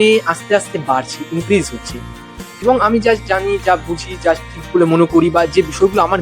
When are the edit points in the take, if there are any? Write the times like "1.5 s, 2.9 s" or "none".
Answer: 2.6 s